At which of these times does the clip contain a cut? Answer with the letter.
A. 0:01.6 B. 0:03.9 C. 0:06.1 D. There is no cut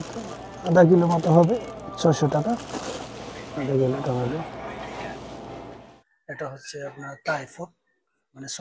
C